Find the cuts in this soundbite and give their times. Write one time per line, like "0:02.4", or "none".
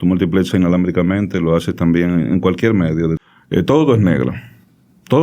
0:03.2